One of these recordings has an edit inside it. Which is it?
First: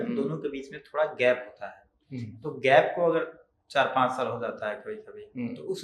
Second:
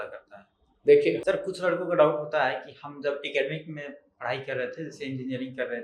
second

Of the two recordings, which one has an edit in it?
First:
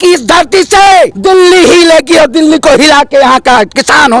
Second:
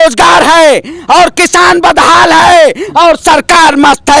first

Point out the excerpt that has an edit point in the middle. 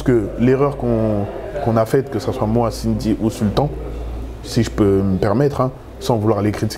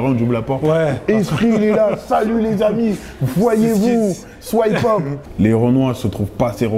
second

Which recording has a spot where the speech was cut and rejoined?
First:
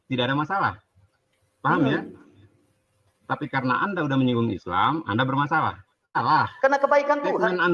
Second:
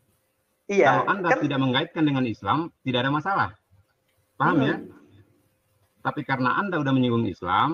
first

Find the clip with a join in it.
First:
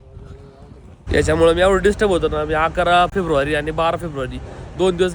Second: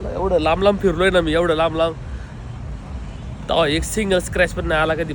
first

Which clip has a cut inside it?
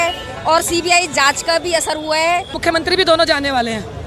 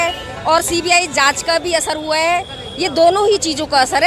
first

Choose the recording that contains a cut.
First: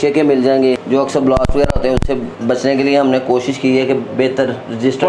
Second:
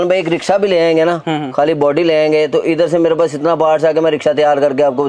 first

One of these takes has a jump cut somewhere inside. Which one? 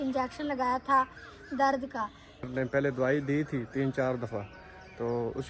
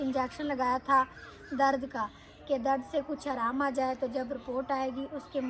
first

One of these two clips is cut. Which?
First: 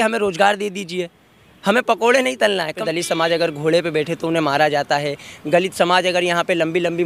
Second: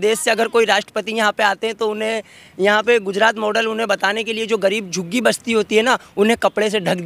first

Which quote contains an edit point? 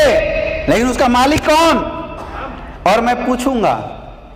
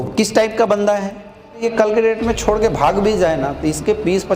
second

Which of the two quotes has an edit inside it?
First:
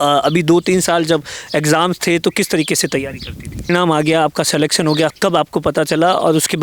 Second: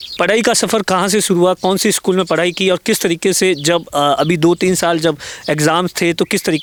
first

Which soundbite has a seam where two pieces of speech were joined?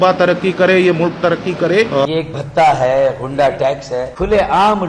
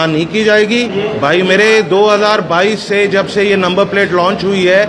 first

